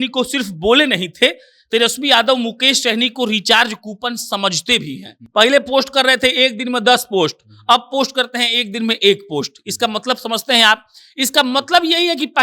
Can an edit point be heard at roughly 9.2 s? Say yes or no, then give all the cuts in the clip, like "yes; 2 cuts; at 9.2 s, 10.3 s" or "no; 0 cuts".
no; 1 cut; at 5.1 s